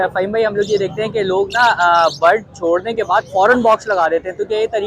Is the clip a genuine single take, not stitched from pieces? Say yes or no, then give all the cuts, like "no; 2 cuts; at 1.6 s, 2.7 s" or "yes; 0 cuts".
yes; 0 cuts